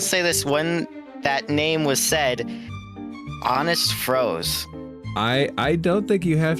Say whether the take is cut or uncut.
uncut